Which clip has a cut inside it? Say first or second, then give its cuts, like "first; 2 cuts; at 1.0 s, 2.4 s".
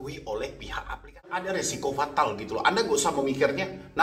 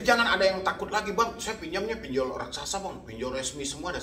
first; 1 cut; at 1.3 s